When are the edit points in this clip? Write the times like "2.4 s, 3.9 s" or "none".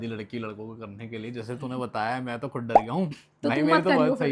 none